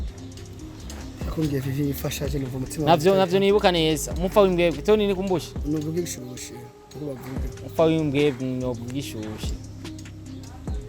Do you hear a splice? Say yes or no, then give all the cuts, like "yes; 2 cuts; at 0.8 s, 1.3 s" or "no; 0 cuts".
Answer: yes; 1 cut; at 1.3 s